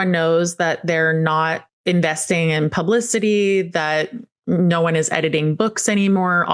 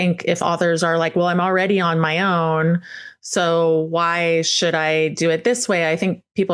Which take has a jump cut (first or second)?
first